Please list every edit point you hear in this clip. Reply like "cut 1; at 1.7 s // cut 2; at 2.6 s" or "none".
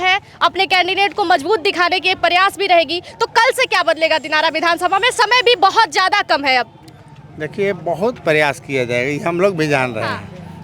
none